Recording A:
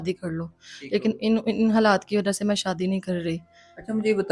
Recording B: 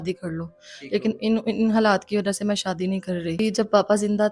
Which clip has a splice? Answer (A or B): B